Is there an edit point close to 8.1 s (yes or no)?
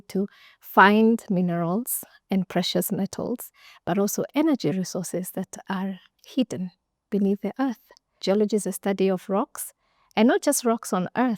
yes